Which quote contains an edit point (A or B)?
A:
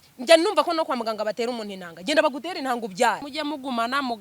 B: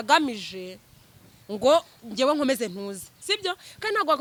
A